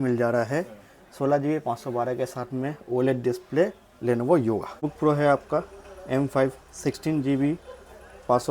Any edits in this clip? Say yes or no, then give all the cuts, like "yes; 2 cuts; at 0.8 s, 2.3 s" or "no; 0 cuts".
yes; 1 cut; at 4.8 s